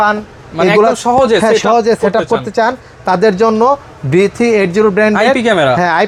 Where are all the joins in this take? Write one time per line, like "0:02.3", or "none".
none